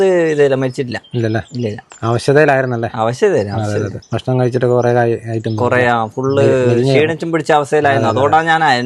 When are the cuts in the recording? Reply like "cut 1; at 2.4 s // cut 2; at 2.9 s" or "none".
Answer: none